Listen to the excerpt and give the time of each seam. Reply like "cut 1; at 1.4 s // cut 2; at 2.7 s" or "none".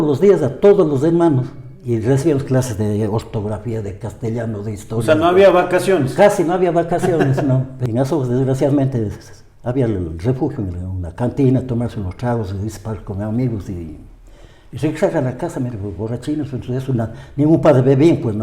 cut 1; at 7.7 s